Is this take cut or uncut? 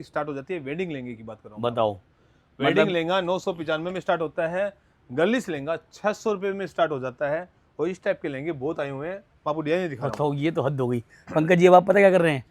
uncut